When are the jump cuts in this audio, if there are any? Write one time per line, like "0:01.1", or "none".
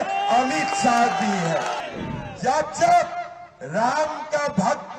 0:01.9